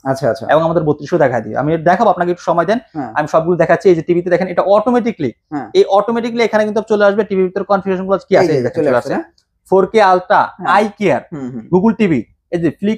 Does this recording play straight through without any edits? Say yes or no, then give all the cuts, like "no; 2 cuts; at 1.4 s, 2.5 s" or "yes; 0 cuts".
yes; 0 cuts